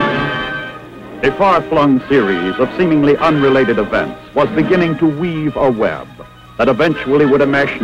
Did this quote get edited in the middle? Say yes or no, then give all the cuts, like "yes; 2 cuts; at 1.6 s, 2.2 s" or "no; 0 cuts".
yes; 1 cut; at 2.4 s